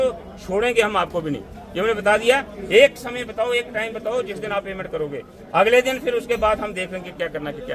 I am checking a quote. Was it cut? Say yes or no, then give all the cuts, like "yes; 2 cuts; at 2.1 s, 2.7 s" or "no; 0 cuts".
no; 0 cuts